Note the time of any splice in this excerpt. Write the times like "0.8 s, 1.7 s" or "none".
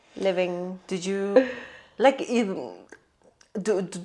1.3 s